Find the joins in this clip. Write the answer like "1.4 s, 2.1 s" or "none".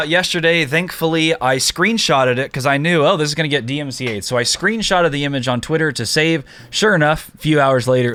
none